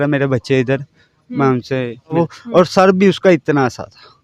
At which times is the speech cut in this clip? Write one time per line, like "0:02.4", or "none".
0:02.2